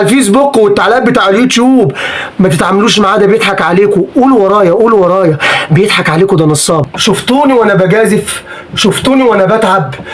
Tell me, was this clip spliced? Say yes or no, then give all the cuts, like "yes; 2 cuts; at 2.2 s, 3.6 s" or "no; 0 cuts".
yes; 1 cut; at 6.9 s